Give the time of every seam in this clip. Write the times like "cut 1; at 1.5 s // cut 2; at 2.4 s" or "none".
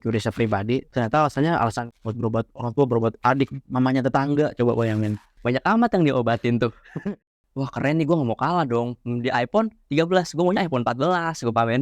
cut 1; at 0.9 s // cut 2; at 3.6 s // cut 3; at 7.3 s